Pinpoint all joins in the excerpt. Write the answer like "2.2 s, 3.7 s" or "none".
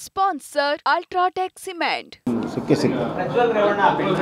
2.3 s

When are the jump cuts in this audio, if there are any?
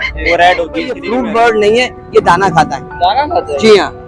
1.0 s

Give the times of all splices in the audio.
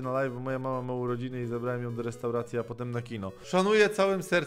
3.4 s

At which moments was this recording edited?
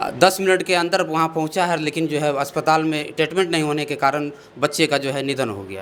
none

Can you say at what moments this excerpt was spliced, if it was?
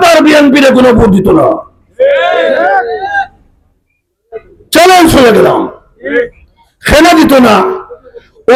none

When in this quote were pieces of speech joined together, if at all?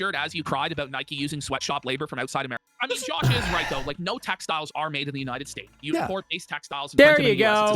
2.7 s

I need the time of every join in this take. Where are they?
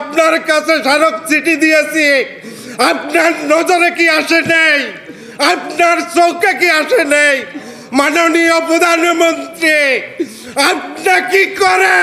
none

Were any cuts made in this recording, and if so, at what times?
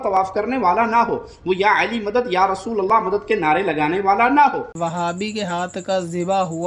4.7 s

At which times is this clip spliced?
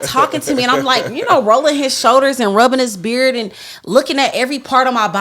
none

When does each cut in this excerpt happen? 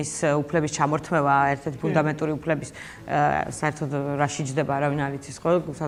none

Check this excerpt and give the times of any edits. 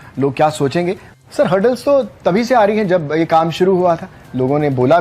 1.1 s

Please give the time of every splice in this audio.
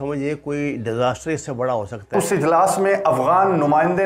2.1 s

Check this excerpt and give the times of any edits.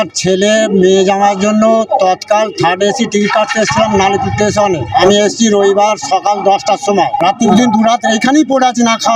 5.0 s, 7.5 s

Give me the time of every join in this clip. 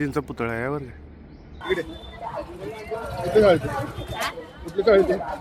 1.5 s

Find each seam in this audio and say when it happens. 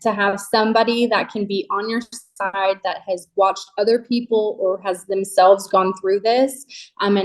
none

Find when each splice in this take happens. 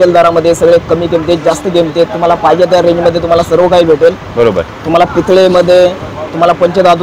none

